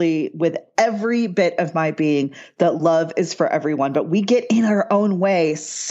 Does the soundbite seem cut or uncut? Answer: uncut